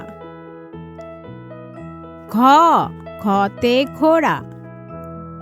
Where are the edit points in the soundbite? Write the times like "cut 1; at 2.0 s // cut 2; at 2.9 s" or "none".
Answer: cut 1; at 4.4 s